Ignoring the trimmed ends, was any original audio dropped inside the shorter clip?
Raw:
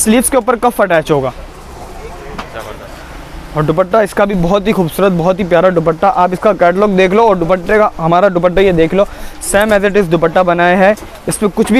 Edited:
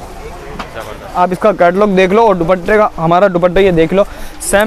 yes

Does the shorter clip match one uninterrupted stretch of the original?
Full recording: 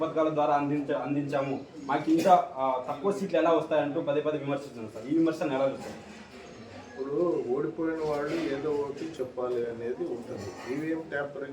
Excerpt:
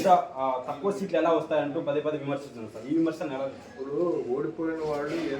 no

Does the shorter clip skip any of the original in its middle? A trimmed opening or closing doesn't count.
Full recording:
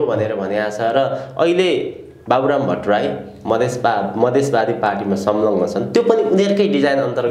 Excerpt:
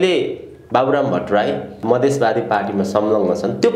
yes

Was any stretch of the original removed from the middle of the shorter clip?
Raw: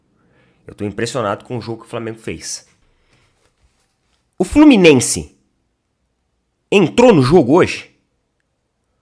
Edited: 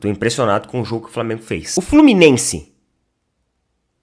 yes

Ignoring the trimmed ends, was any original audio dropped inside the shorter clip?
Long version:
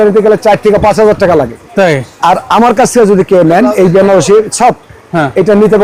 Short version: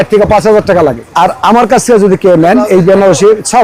yes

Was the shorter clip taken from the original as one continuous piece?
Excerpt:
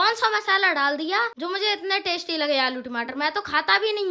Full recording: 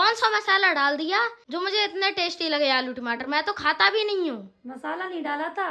no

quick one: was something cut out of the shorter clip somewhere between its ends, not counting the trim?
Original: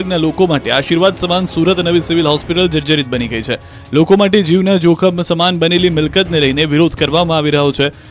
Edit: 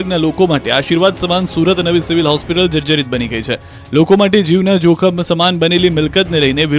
no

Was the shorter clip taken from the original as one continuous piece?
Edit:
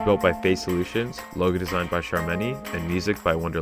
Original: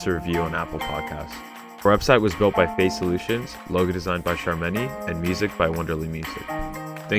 yes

